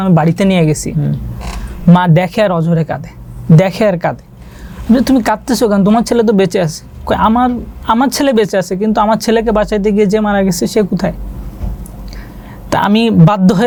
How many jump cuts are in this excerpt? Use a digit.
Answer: 0